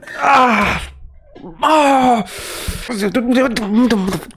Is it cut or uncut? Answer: uncut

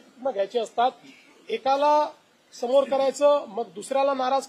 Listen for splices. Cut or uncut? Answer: uncut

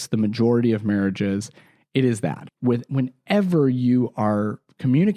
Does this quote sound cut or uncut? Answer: cut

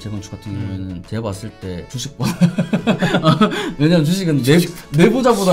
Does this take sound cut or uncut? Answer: cut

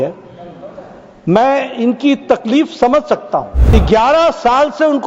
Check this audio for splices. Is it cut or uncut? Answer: cut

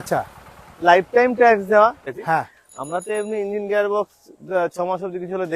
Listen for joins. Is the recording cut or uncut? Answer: cut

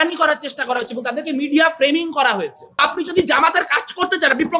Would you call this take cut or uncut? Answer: cut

